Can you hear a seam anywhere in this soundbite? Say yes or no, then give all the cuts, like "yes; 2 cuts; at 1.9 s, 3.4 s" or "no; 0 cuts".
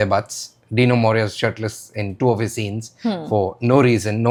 no; 0 cuts